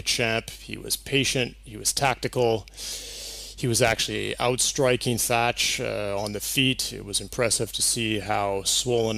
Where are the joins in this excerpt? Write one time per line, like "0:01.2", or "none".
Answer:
0:06.1